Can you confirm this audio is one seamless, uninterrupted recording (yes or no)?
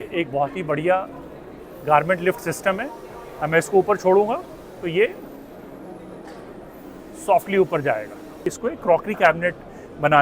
no